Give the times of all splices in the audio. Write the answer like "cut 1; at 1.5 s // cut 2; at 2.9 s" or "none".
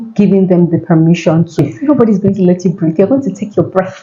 cut 1; at 1.7 s